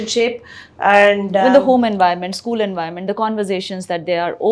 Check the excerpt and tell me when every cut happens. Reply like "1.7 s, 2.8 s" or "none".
1.4 s